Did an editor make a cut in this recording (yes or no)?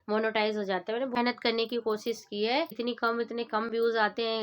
yes